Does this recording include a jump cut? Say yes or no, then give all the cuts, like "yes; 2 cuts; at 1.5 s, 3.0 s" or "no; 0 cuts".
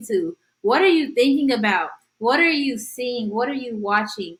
no; 0 cuts